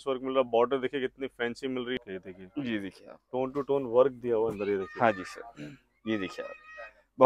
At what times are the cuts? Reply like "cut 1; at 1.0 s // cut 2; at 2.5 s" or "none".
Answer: cut 1; at 1.9 s